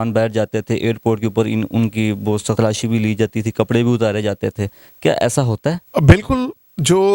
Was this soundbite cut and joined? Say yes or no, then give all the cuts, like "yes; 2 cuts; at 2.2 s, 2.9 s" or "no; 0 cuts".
yes; 2 cuts; at 2.5 s, 5.8 s